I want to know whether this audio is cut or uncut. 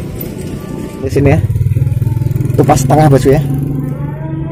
cut